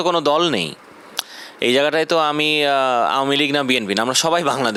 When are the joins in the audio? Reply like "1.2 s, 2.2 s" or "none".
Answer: none

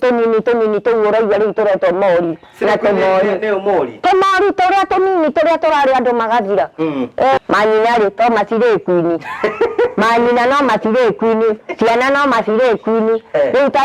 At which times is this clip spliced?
7.4 s

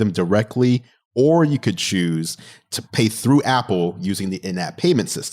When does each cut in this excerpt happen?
1.0 s

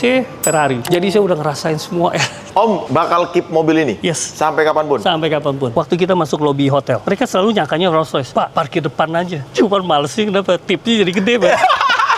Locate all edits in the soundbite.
0.9 s, 2.3 s, 5.7 s, 7.0 s, 9.5 s

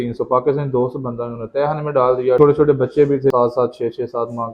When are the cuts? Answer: 2.4 s, 3.3 s

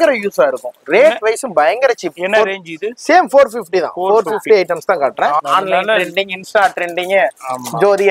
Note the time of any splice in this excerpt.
5.4 s

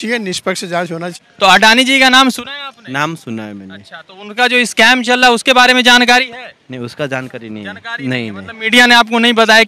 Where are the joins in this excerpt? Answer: 1.1 s

